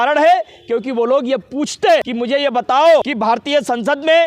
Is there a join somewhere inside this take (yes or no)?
yes